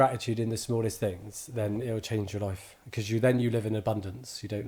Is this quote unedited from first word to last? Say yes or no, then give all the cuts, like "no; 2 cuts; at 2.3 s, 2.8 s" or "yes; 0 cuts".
yes; 0 cuts